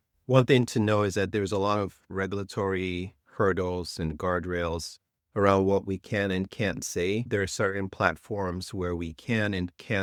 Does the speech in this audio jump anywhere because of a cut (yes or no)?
no